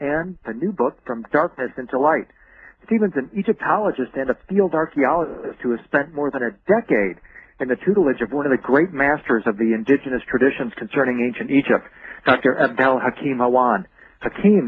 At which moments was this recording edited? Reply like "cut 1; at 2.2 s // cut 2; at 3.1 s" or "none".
none